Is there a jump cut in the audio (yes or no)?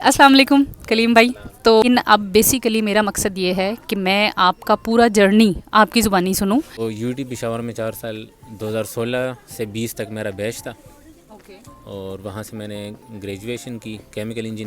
yes